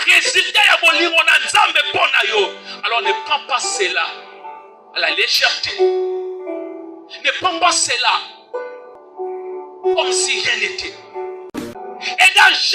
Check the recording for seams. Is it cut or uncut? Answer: cut